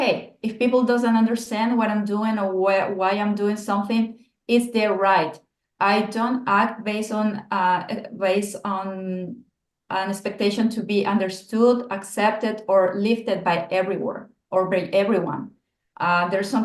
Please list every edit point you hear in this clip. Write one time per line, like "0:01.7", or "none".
none